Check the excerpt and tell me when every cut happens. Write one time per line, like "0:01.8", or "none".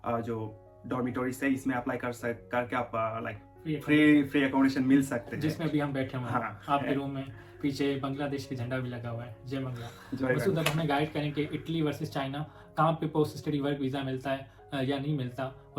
none